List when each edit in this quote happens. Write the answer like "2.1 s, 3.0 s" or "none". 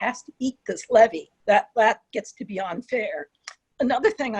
1.3 s